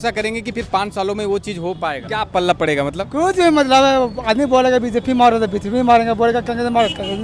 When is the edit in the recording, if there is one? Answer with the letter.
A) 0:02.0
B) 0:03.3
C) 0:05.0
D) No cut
A